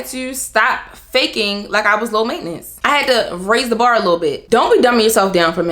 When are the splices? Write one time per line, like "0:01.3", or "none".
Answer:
0:04.4